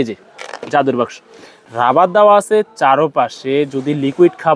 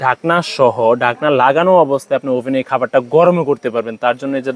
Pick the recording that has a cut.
first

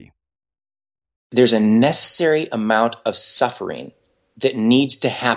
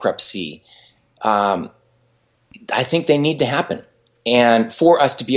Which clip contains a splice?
first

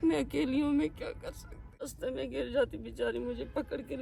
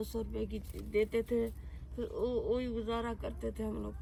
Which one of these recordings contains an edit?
first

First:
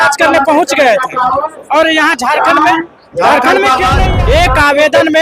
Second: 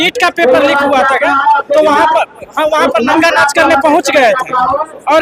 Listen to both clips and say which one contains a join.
first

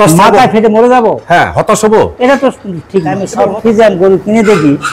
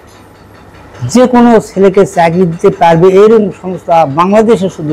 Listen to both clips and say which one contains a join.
first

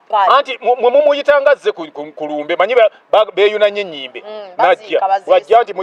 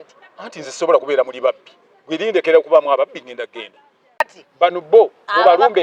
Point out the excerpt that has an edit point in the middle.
second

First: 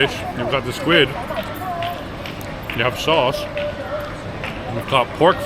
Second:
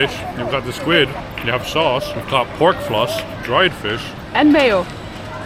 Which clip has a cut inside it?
second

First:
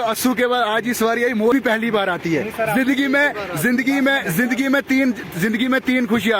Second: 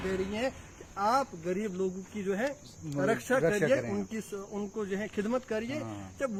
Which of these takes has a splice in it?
first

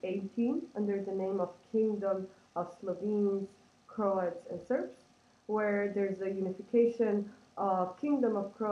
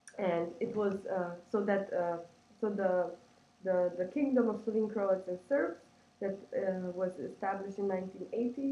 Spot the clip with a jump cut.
first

